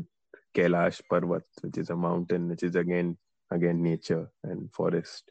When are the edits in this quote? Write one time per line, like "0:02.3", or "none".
none